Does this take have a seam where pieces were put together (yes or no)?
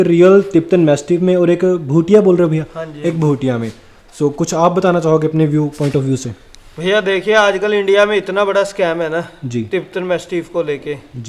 no